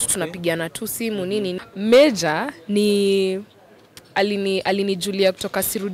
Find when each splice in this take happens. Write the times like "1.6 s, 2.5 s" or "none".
1.6 s